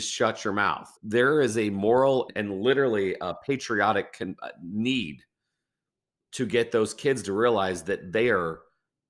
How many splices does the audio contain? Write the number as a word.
one